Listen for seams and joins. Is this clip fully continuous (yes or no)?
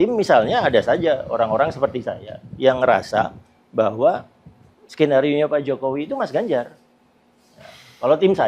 yes